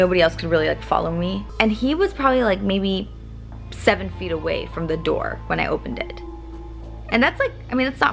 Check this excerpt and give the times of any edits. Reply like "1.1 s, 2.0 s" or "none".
1.5 s